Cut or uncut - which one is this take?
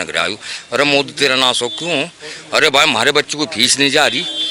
uncut